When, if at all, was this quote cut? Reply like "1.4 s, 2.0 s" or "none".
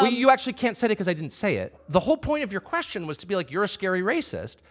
1.8 s